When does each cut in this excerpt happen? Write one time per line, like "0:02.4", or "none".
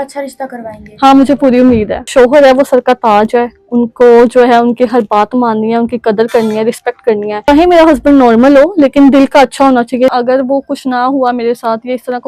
0:02.1
0:07.4
0:10.1